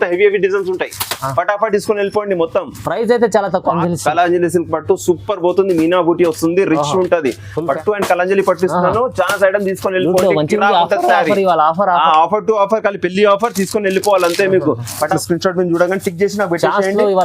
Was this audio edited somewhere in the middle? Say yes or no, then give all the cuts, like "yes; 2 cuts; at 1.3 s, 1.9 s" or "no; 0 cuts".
yes; 3 cuts; at 3.8 s, 7.7 s, 15.1 s